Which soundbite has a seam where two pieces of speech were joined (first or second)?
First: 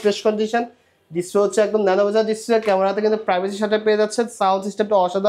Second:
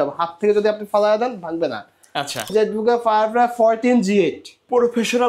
second